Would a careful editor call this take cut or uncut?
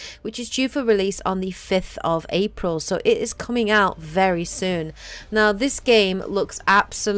uncut